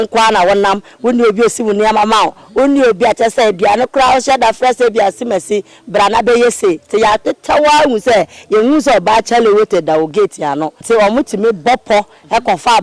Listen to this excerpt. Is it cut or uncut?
cut